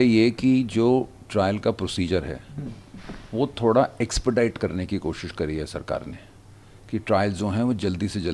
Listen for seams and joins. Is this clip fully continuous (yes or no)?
yes